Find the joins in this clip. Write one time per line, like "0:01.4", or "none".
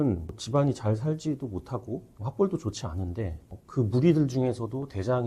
0:02.2